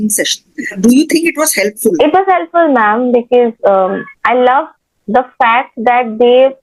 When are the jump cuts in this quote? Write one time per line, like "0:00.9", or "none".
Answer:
0:00.8
0:02.0